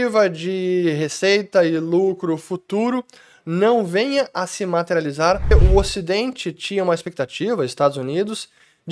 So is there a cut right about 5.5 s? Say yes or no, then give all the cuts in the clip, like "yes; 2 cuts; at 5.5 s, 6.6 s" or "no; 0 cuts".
yes; 1 cut; at 5.5 s